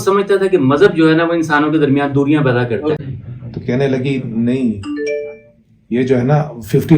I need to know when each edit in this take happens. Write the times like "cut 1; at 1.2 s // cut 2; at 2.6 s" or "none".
cut 1; at 3.0 s